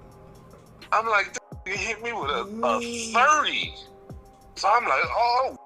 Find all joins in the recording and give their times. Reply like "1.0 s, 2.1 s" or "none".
none